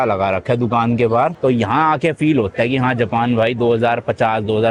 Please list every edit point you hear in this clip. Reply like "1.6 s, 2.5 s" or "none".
1.4 s